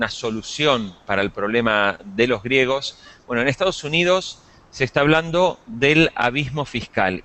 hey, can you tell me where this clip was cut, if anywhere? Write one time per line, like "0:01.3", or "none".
0:04.0

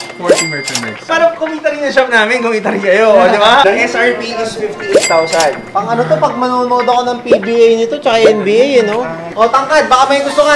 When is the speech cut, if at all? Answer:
0:03.6
0:05.7
0:09.3

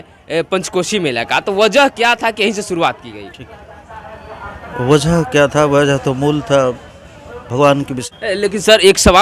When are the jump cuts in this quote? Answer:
0:08.0

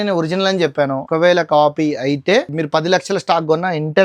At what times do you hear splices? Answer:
0:01.0
0:02.6

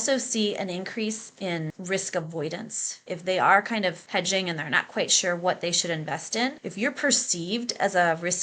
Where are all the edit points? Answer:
0:01.7
0:03.0
0:04.0
0:06.6

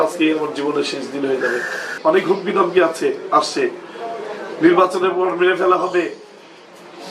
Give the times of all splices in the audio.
0:01.9

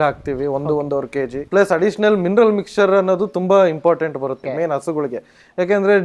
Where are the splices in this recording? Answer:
0:01.4
0:04.4

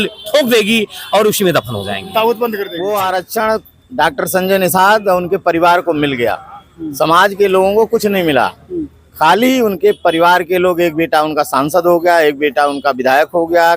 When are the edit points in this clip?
0:02.7

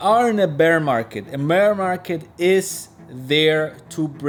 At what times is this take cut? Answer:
none

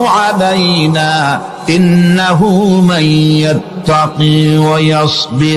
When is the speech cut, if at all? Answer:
none

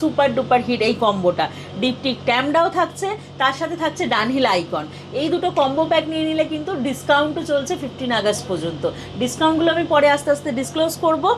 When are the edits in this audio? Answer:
none

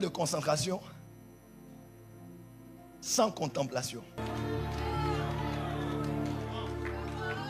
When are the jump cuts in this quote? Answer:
0:04.2

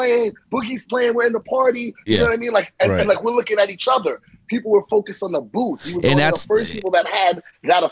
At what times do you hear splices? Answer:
none

